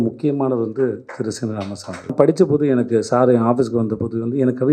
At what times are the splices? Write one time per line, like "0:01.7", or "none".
0:02.1

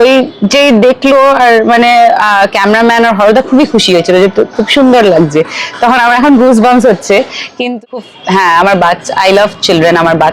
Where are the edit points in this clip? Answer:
0:07.6

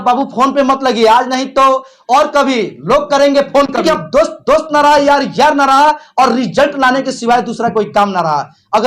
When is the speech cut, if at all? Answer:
0:03.8

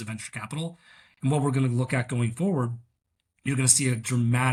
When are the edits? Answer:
none

